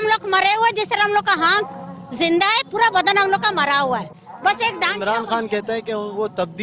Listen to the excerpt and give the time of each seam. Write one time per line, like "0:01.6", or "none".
0:04.2